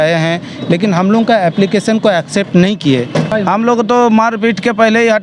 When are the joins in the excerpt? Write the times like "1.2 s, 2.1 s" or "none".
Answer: 3.3 s